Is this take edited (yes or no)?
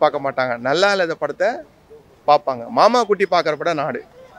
no